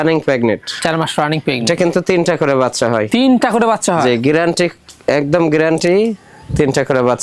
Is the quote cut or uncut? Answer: uncut